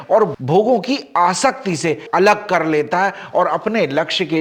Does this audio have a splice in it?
no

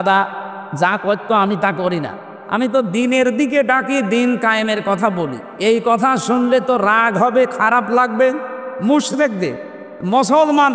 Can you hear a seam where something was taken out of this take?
no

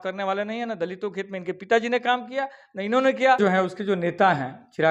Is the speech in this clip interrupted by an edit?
yes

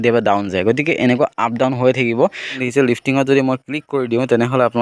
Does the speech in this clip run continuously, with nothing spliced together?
no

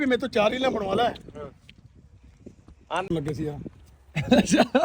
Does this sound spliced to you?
yes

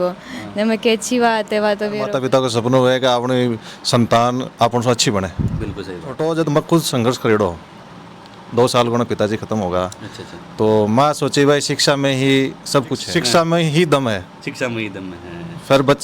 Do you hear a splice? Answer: yes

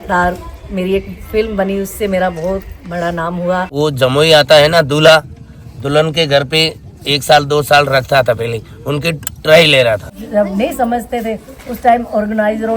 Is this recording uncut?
no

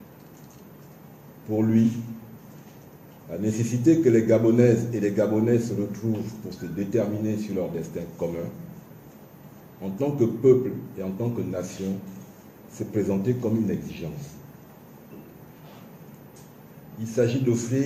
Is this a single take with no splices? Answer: no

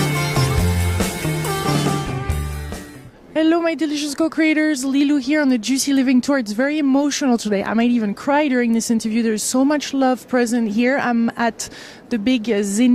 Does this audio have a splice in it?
no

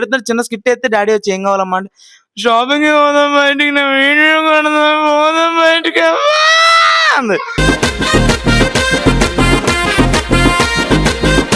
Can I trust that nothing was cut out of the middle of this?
yes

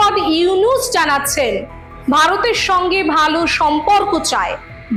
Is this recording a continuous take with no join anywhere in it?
yes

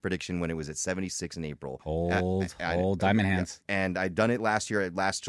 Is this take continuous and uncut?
no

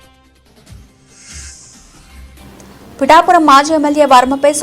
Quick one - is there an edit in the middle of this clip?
yes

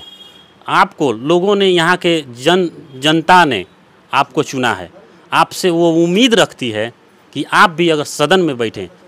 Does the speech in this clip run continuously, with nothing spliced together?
yes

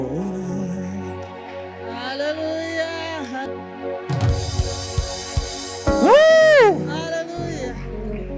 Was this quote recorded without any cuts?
no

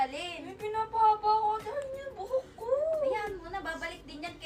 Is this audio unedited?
yes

